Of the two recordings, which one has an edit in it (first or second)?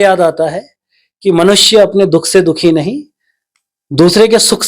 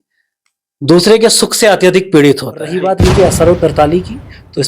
second